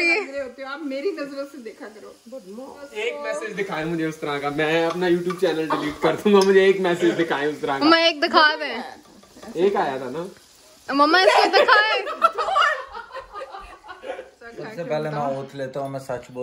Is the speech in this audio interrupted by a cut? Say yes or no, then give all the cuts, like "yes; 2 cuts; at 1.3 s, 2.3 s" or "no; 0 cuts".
yes; 2 cuts; at 2.9 s, 14.6 s